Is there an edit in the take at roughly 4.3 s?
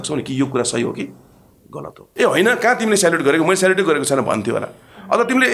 no; 1 cut; at 2.0 s

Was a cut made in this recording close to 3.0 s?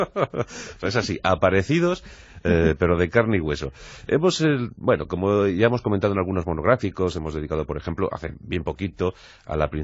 yes; 1 cut; at 3.0 s

